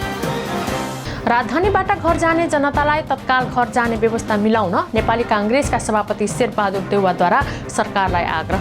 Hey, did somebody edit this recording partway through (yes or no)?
yes